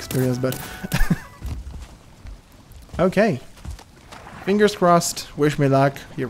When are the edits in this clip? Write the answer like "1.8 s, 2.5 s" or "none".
1.3 s